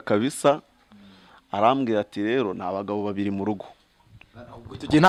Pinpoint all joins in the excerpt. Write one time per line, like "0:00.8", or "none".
none